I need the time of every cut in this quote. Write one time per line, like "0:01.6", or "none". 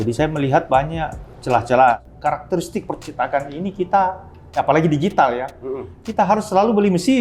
0:02.1